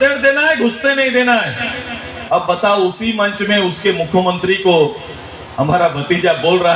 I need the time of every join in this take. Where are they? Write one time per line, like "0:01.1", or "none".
none

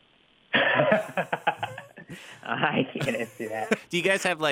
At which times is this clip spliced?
none

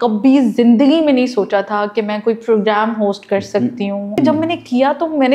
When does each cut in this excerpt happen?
0:04.1

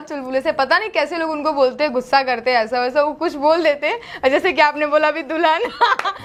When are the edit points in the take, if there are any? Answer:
none

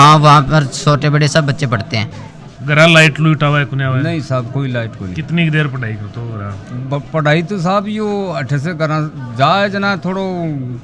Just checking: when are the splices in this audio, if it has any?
0:02.1

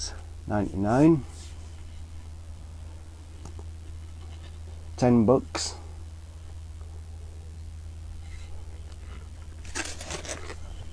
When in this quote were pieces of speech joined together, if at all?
0:02.9

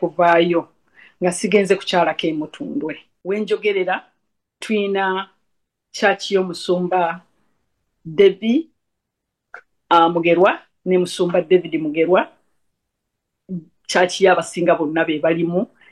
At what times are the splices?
0:03.1

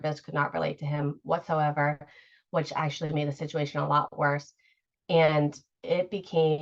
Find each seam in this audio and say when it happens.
0:05.7

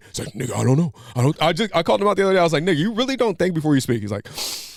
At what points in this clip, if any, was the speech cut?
none

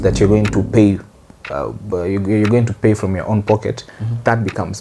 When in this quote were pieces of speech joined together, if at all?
none

